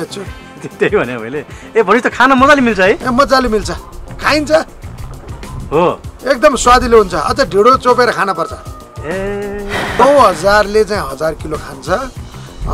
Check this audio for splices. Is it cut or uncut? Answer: cut